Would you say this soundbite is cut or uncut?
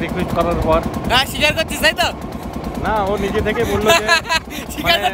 uncut